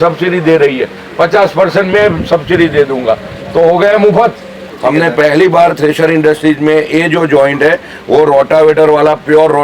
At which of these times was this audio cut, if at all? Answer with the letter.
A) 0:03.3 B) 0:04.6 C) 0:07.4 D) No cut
B